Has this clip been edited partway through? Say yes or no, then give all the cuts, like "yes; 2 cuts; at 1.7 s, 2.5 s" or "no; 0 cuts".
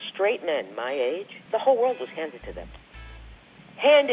yes; 1 cut; at 1.3 s